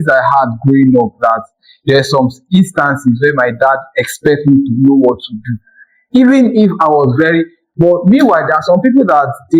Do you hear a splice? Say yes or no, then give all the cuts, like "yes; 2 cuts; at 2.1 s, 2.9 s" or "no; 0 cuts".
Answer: yes; 1 cut; at 7.6 s